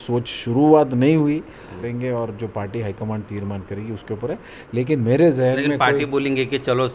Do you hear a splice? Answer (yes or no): yes